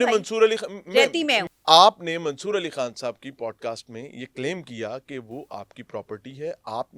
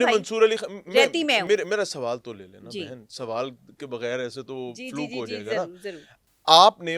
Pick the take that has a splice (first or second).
first